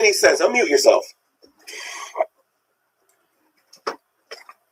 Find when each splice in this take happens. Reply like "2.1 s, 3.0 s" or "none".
none